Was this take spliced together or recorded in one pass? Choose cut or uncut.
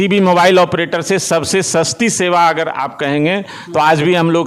uncut